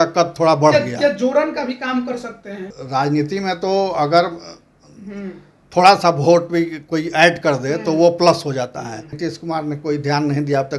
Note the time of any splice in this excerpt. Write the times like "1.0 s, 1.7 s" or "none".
2.7 s, 9.2 s